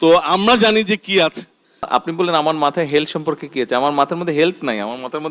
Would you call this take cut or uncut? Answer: cut